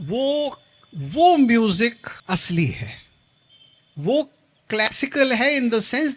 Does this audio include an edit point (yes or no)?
yes